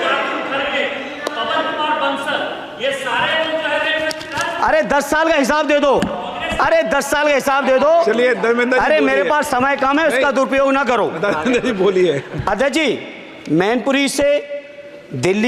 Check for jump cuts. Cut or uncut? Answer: uncut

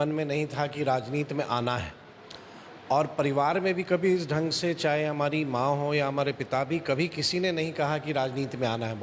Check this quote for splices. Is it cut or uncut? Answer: uncut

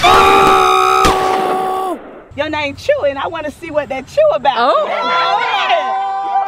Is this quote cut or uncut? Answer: cut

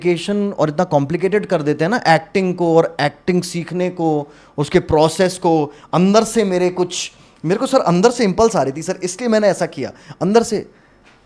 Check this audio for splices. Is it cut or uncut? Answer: uncut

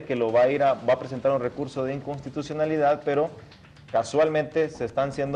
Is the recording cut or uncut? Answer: cut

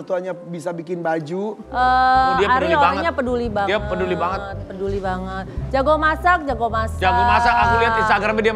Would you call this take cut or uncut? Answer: cut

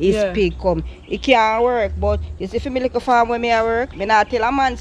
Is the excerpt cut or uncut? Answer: uncut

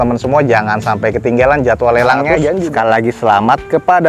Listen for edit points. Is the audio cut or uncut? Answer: cut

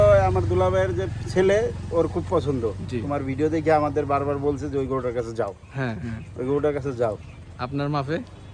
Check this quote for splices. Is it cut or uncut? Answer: uncut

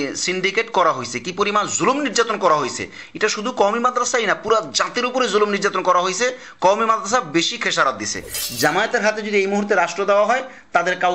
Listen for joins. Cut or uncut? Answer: cut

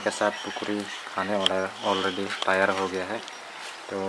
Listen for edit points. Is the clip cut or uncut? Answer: uncut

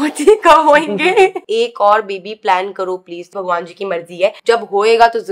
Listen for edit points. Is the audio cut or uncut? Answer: cut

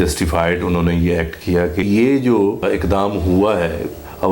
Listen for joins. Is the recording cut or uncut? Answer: cut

